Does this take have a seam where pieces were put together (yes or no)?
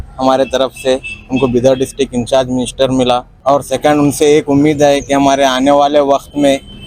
no